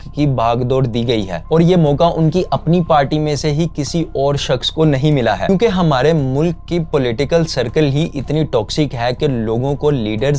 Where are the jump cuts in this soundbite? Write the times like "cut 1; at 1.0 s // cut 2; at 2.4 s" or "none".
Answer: cut 1; at 1.4 s // cut 2; at 5.5 s